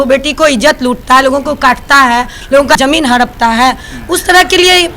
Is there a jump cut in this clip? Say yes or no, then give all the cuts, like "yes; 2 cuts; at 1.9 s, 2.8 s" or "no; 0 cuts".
no; 0 cuts